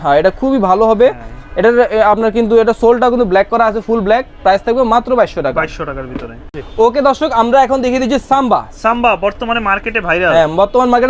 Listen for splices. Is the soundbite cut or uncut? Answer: uncut